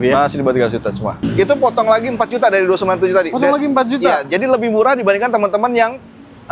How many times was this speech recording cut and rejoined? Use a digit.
1